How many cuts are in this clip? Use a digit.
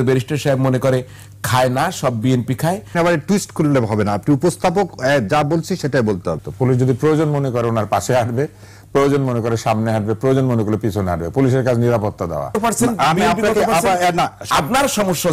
4